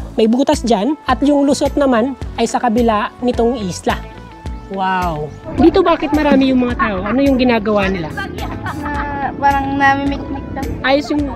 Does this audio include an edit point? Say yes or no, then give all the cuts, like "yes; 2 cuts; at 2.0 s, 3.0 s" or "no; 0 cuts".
yes; 2 cuts; at 1.0 s, 5.4 s